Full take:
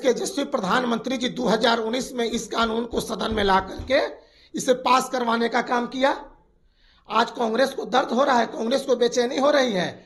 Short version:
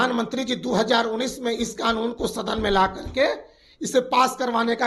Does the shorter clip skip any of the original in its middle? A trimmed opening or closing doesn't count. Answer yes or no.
no